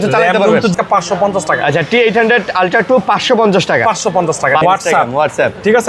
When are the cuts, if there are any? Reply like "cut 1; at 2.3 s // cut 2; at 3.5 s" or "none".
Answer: cut 1; at 0.7 s // cut 2; at 4.6 s

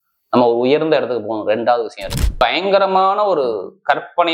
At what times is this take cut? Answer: cut 1; at 2.4 s

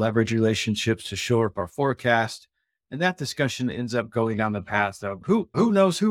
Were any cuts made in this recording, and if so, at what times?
none

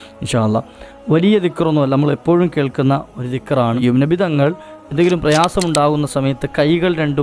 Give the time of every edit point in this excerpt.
cut 1; at 3.8 s

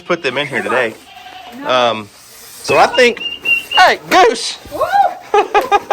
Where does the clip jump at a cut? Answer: none

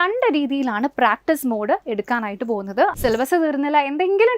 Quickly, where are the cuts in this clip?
cut 1; at 2.9 s

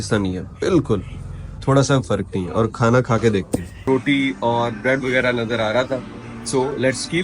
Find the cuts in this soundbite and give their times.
cut 1; at 3.8 s

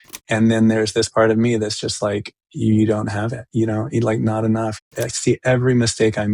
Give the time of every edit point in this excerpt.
cut 1; at 4.9 s

